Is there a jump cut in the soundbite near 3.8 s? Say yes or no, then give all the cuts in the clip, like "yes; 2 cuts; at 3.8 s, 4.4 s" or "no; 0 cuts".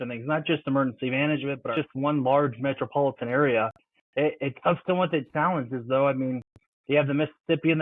no; 1 cut; at 1.7 s